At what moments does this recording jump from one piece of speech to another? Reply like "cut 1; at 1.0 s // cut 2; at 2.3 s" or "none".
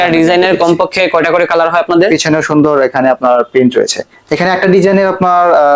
none